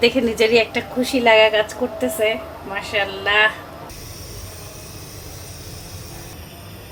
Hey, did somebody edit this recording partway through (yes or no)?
no